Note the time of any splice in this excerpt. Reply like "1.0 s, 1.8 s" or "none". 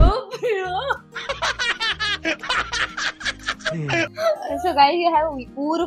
none

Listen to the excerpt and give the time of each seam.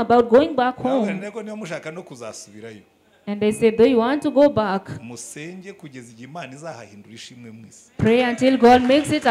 none

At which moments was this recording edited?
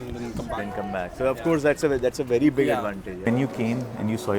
3.1 s

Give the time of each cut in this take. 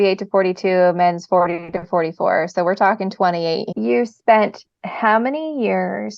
3.7 s

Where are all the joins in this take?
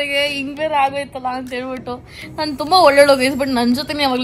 none

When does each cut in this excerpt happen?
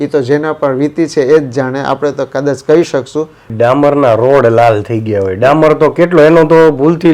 3.5 s

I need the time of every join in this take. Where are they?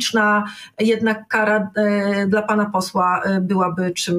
none

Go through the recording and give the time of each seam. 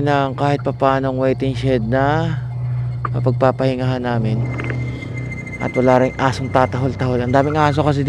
none

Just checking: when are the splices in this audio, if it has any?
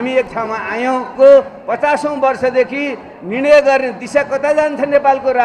1.1 s

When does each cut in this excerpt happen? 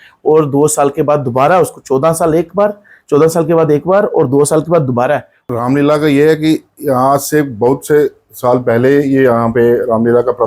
5.5 s

